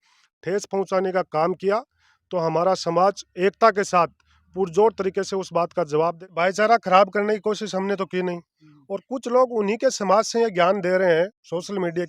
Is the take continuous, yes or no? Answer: no